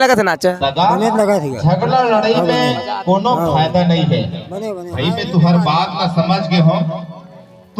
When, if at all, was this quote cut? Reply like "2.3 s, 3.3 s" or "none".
none

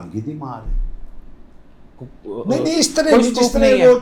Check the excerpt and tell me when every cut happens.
2.0 s

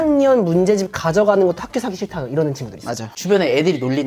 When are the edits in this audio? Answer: 3.1 s

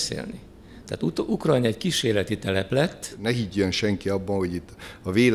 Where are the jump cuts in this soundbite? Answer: 3.1 s

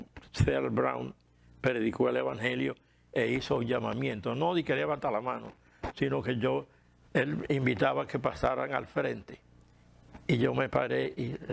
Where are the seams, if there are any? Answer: none

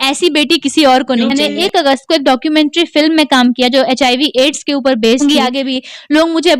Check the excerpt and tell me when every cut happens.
1.3 s, 5.2 s

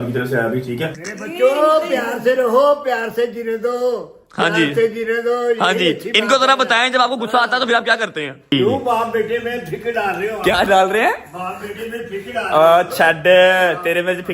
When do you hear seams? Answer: 1.0 s, 8.5 s

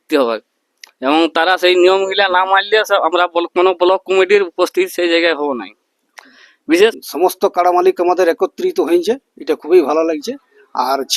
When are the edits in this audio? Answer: 7.0 s

